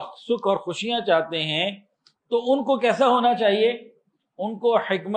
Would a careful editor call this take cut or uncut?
uncut